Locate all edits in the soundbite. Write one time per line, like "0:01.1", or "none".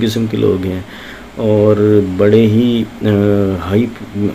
none

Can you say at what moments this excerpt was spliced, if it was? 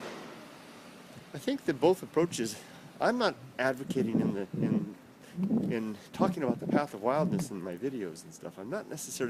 0:03.6

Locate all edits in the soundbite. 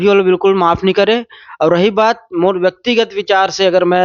none

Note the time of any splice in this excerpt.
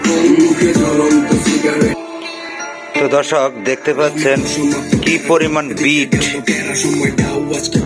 none

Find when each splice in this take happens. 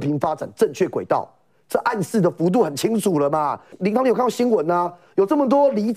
0:03.7

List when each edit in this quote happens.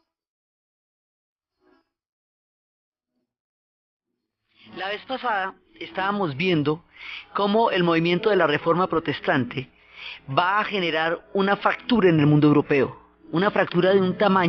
none

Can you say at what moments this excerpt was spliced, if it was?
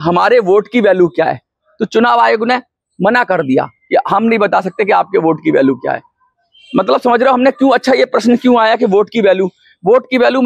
none

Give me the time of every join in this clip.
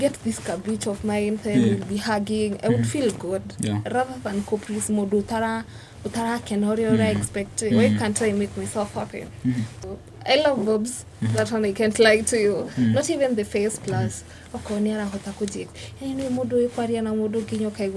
0:09.8

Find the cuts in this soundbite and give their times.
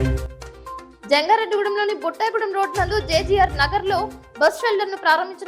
none

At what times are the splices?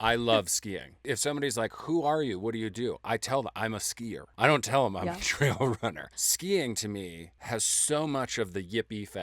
0:01.0

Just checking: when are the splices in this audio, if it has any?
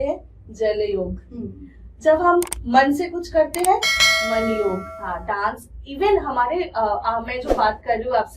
0:05.0

